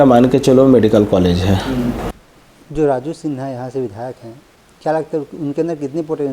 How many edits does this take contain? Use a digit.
1